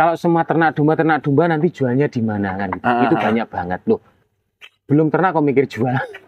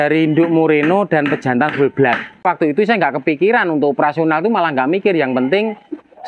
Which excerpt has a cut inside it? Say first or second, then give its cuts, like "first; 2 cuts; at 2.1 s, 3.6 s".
second; 1 cut; at 2.5 s